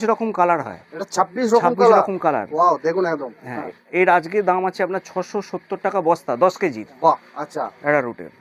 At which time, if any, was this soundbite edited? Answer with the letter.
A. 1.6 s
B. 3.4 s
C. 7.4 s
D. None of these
D